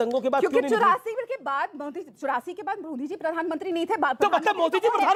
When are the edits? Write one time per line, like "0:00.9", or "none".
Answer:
none